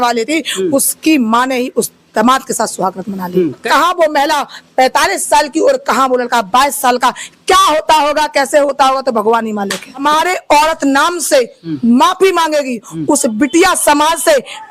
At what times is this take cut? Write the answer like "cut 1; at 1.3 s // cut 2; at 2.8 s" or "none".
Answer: cut 1; at 3.6 s // cut 2; at 10.0 s